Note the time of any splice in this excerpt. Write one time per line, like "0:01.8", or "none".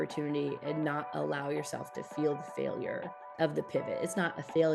0:03.2